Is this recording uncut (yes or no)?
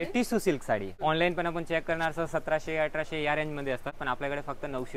no